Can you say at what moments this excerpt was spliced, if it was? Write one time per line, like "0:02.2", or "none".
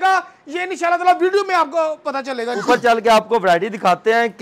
0:02.5